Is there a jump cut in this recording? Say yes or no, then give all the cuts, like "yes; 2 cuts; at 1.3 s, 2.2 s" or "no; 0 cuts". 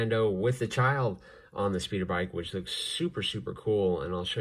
no; 0 cuts